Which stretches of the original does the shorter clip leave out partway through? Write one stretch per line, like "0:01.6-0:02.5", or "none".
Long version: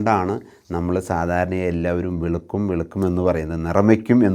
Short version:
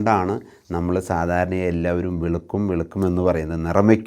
none